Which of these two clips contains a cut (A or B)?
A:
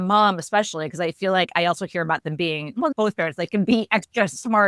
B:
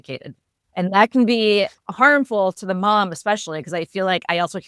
A